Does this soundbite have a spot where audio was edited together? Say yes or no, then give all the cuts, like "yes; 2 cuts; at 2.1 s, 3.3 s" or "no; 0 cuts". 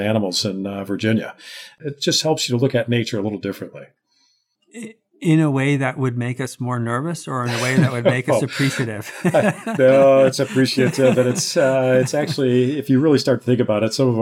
yes; 1 cut; at 1.8 s